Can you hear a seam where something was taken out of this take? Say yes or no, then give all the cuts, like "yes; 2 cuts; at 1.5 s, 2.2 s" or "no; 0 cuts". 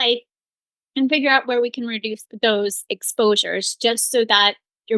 yes; 1 cut; at 2.2 s